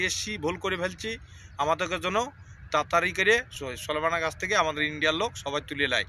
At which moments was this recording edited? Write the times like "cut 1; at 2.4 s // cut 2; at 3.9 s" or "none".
cut 1; at 3.5 s